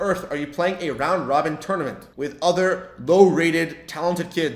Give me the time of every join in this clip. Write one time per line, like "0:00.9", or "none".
0:02.0